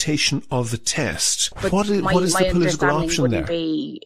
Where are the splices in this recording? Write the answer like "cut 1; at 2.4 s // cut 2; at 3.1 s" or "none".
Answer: cut 1; at 1.5 s